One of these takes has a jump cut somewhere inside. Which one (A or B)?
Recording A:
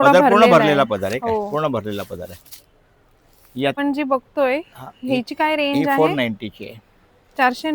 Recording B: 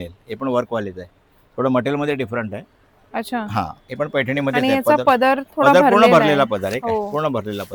A